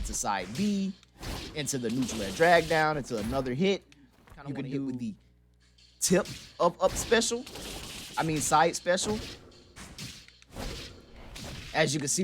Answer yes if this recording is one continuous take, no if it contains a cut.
no